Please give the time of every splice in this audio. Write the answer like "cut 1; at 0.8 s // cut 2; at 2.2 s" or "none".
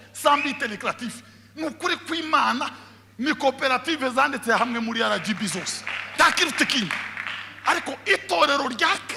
none